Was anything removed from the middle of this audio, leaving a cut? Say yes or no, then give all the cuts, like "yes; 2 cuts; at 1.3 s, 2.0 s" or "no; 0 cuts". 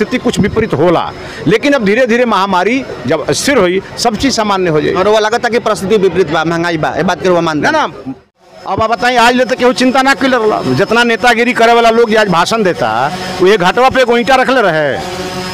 yes; 1 cut; at 8.1 s